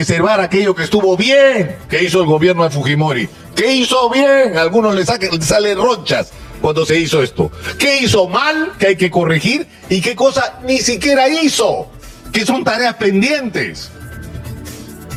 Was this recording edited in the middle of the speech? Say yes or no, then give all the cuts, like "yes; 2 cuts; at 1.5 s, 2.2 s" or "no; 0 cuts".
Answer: no; 0 cuts